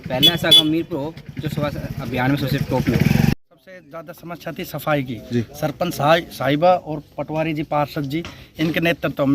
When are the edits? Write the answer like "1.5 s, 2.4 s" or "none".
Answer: 3.3 s